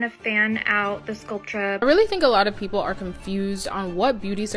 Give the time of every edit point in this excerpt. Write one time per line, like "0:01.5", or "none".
0:01.8